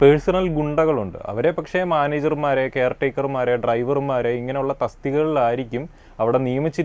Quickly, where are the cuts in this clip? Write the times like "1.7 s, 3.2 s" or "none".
none